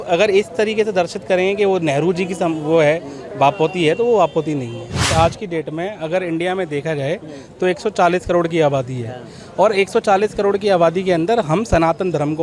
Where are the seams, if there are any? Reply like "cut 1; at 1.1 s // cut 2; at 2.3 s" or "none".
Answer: cut 1; at 5.1 s